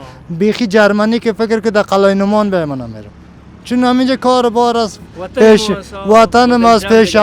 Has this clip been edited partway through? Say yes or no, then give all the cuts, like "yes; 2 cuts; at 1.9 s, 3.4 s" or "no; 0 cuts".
no; 0 cuts